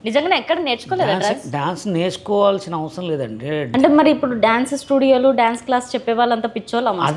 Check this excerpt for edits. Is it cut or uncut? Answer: cut